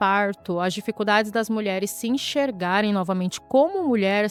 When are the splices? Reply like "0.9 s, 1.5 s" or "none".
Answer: none